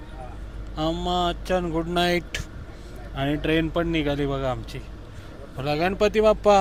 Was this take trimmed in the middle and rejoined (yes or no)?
no